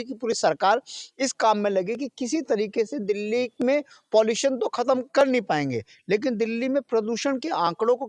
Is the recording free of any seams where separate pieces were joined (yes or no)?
yes